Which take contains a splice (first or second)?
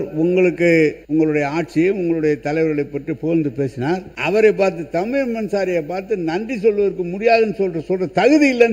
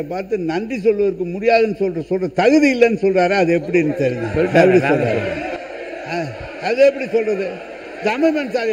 first